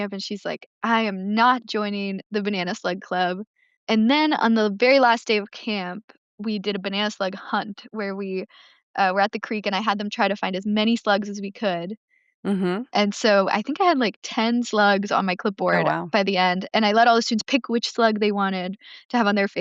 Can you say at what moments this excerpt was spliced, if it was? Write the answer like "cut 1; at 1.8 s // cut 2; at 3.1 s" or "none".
none